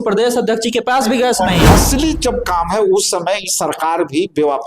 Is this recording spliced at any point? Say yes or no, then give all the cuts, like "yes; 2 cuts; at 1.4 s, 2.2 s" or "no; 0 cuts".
yes; 1 cut; at 1.7 s